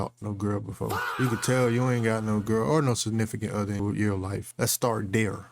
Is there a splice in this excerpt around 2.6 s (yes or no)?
no